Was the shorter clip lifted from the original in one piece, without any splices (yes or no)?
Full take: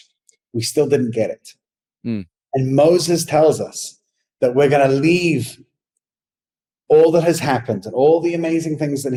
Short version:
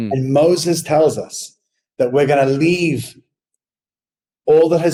yes